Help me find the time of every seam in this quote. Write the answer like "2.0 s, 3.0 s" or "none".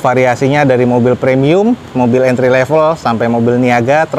none